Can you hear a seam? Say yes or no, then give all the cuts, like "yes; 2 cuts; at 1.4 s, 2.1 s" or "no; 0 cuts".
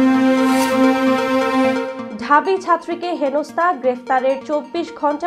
yes; 1 cut; at 1.8 s